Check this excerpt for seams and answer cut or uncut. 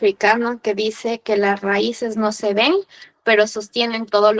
uncut